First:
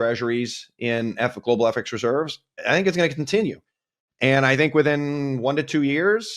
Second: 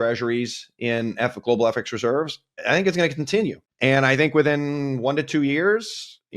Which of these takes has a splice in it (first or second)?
second